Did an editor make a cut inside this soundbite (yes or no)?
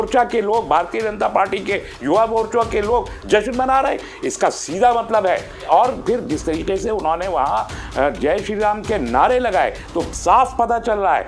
yes